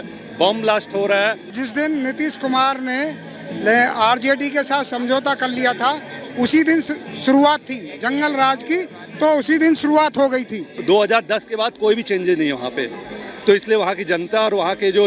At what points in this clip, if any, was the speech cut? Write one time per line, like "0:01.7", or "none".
0:01.5
0:10.7